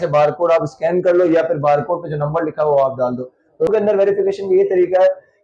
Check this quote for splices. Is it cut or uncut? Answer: cut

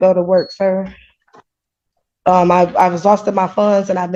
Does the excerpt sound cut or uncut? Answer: uncut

